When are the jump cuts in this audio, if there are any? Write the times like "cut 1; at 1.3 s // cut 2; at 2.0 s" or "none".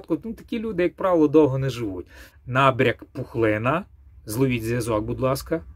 cut 1; at 2.3 s